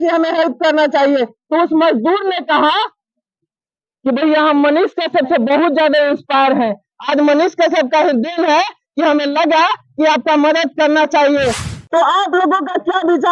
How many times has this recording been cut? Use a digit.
1